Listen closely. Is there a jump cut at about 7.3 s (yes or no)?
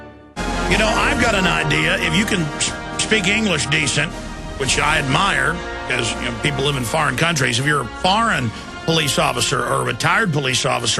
yes